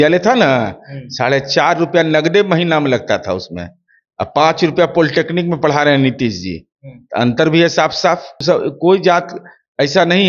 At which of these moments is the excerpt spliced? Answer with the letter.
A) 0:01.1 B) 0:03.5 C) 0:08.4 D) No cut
C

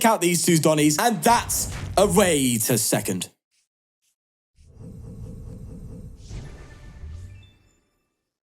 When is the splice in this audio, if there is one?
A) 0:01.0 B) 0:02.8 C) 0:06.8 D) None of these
A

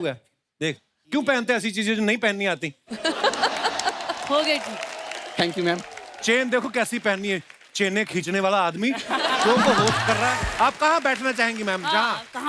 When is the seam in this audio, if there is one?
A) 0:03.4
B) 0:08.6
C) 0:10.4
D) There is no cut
C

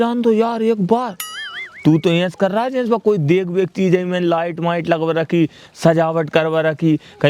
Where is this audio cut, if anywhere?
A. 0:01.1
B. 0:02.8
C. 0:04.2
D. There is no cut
D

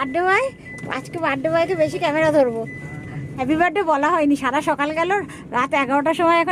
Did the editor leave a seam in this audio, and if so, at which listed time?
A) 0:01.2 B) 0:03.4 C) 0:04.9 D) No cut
B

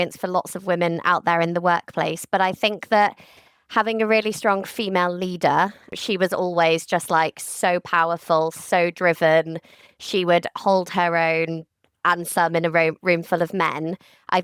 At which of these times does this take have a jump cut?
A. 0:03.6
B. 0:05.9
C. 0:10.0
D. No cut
B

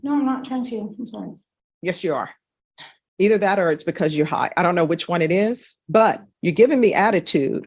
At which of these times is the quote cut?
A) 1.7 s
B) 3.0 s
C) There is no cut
C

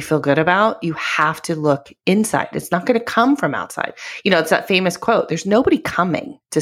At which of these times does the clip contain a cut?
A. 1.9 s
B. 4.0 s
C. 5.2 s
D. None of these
D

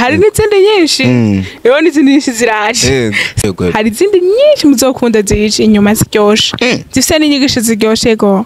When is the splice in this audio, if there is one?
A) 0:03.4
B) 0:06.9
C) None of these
A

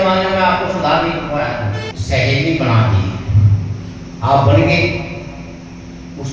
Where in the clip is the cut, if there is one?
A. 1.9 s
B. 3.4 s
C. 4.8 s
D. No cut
A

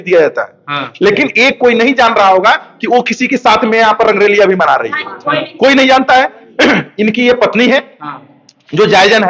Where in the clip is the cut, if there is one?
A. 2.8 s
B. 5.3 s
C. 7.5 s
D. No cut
D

